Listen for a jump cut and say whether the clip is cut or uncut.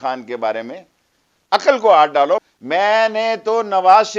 cut